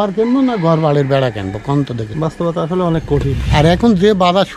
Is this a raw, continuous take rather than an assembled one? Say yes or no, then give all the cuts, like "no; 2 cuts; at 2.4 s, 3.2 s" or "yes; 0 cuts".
no; 2 cuts; at 2.1 s, 3.4 s